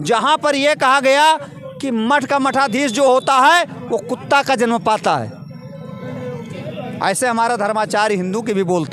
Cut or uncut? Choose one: uncut